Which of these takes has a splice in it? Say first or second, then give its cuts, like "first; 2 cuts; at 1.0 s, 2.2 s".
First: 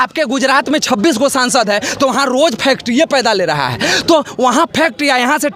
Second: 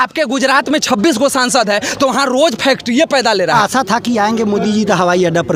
second; 1 cut; at 3.5 s